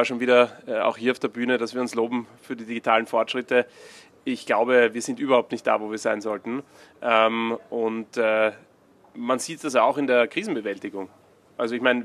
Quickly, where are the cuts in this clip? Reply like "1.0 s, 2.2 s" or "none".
none